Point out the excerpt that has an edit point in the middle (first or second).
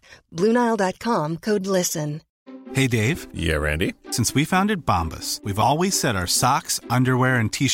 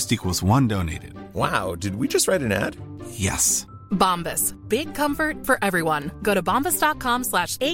first